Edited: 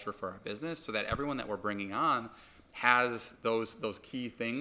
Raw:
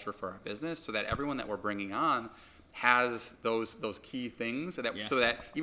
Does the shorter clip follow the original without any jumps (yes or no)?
yes